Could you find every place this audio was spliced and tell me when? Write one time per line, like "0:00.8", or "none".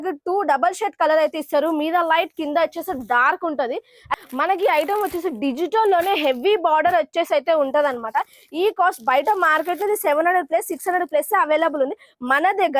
0:04.0